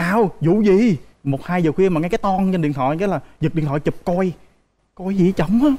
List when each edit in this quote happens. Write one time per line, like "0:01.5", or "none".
none